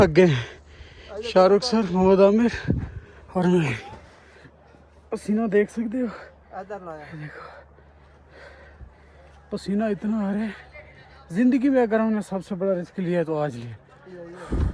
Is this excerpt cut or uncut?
uncut